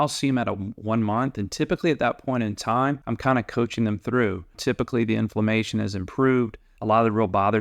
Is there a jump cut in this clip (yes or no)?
yes